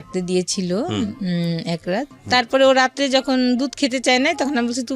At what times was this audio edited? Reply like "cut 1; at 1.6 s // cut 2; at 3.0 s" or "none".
cut 1; at 2.2 s